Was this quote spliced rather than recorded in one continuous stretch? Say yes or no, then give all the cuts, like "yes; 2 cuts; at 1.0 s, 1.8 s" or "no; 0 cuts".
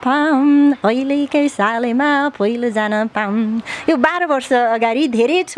no; 0 cuts